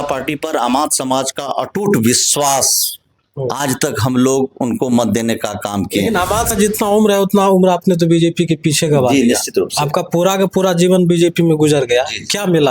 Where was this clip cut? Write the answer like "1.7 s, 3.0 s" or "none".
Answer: 6.5 s